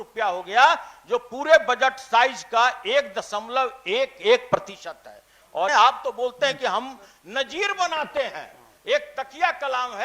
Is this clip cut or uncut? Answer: cut